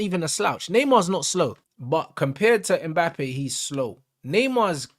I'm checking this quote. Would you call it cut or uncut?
cut